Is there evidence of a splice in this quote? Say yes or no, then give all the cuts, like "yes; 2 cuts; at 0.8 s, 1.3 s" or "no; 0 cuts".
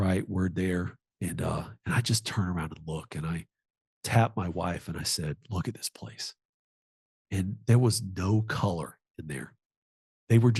no; 0 cuts